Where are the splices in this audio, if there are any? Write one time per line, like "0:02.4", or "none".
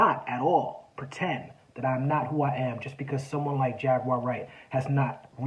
none